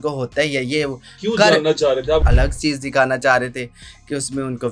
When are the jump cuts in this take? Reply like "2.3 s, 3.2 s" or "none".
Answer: 2.2 s